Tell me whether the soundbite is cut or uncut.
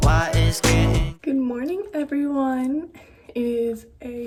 uncut